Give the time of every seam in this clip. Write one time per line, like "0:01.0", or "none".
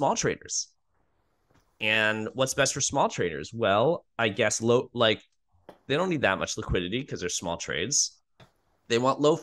0:08.4